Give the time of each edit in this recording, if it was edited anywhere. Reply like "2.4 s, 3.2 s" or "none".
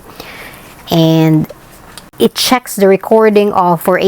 2.1 s